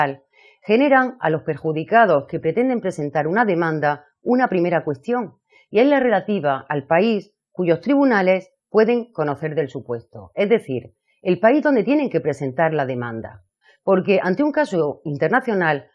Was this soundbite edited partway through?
yes; 1 cut; at 9.0 s

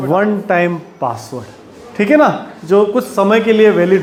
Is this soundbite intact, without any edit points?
yes; 0 cuts

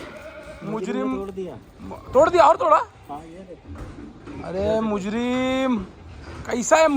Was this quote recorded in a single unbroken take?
yes; 0 cuts

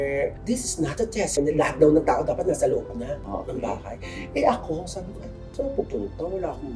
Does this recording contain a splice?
yes; 1 cut; at 1.4 s

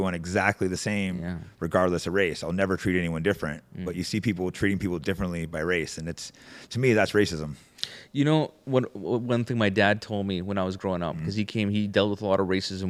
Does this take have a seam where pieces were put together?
no; 0 cuts

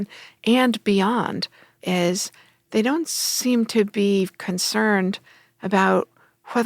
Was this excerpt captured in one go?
no; 1 cut; at 1.8 s

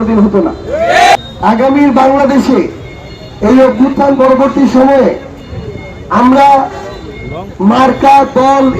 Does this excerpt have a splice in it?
yes; 1 cut; at 1.2 s

